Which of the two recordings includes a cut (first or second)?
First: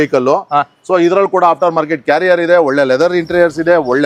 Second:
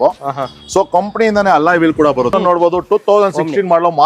second